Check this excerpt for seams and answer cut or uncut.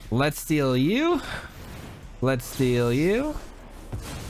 uncut